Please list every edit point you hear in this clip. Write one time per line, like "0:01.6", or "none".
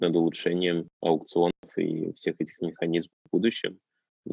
0:00.9